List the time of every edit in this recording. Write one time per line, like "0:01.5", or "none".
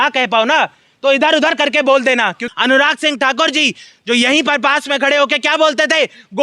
0:02.4